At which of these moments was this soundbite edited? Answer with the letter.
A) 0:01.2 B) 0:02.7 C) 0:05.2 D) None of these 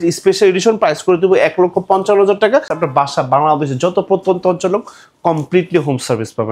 B